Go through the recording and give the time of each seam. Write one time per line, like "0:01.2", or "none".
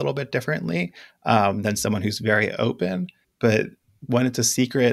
0:03.2
0:03.9